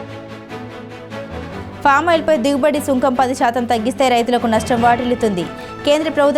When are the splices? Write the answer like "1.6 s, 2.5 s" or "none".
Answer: 1.4 s